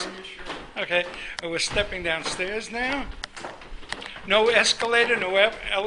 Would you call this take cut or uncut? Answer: cut